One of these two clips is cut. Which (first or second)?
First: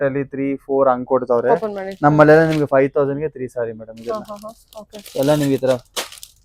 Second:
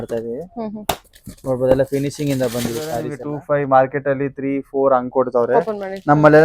second